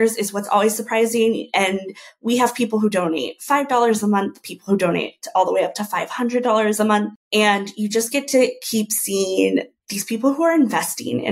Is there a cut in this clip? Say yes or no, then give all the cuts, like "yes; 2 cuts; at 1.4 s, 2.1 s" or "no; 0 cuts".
no; 0 cuts